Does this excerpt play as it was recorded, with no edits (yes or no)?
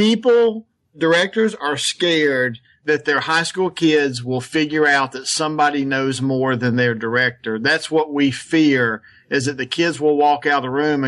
no